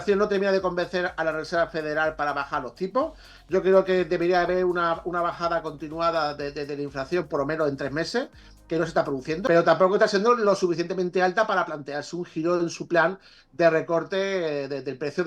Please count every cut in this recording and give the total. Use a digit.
1